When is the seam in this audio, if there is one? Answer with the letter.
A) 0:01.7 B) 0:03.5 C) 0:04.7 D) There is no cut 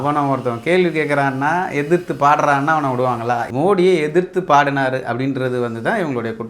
B